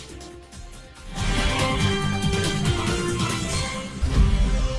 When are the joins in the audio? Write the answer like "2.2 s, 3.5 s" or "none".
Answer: 1.8 s, 4.0 s